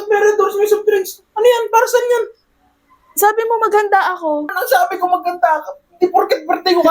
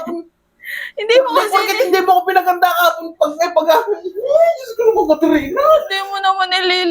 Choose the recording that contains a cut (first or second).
first